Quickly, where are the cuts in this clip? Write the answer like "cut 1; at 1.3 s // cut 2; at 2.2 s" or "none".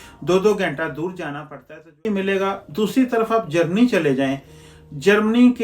cut 1; at 2.0 s